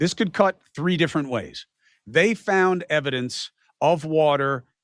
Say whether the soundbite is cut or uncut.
uncut